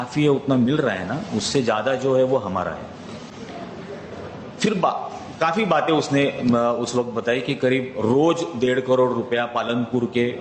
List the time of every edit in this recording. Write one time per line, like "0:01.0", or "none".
none